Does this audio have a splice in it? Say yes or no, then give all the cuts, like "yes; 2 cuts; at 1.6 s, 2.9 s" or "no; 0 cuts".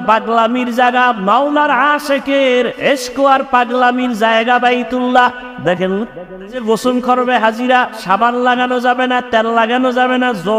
yes; 1 cut; at 6.6 s